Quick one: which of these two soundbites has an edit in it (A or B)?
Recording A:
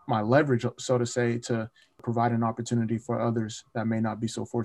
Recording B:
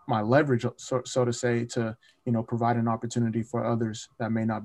A